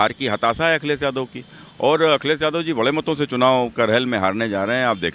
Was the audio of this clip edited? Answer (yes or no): no